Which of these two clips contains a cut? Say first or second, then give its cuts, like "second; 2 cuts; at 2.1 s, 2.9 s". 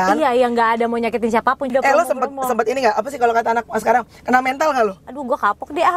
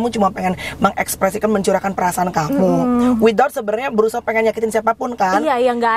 first; 2 cuts; at 1.7 s, 5.1 s